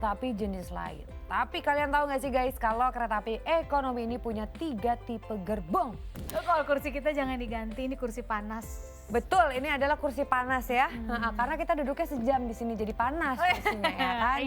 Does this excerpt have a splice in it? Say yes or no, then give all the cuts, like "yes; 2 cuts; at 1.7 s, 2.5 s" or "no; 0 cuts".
yes; 1 cut; at 6.3 s